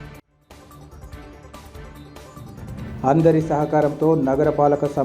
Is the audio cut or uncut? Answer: cut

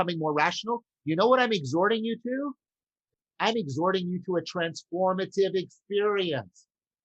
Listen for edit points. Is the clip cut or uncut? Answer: cut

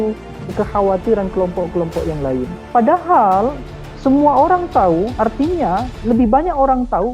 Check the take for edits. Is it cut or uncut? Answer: cut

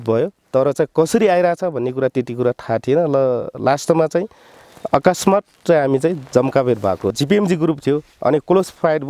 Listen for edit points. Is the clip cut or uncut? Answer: cut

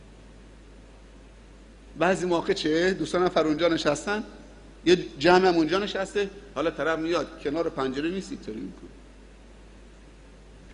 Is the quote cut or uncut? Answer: cut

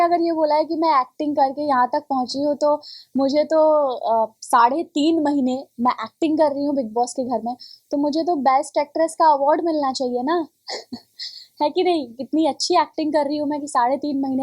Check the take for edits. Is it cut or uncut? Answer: uncut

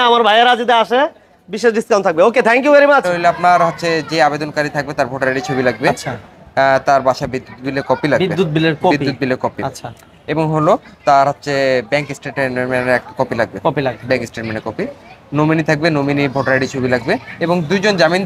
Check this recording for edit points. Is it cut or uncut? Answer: cut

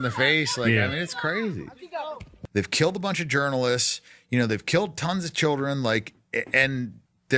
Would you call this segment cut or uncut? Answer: cut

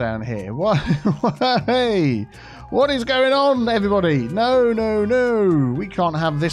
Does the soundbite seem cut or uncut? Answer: uncut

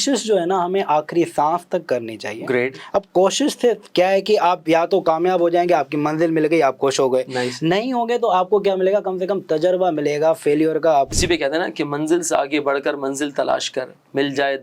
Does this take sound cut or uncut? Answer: cut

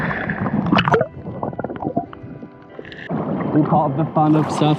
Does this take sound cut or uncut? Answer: cut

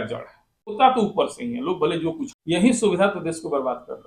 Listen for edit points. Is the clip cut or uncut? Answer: cut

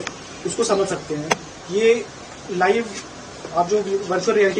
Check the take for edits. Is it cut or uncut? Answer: uncut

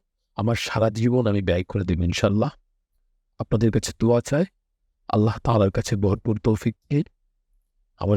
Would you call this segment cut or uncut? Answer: uncut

